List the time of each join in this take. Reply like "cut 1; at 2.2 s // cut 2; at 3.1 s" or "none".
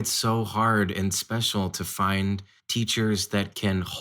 cut 1; at 2.6 s